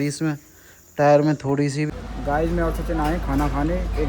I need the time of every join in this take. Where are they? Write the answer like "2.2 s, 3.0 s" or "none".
2.0 s